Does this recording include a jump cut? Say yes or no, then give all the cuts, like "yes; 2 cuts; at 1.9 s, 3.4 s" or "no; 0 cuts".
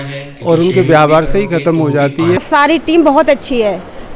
yes; 1 cut; at 2.4 s